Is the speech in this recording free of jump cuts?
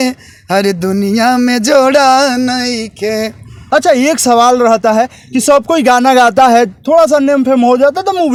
yes; 0 cuts

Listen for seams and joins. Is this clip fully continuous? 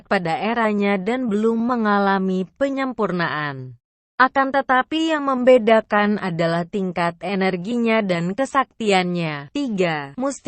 yes; 0 cuts

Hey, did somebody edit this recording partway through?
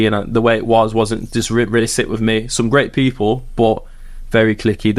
no; 0 cuts

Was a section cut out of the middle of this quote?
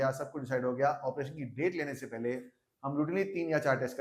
no; 0 cuts

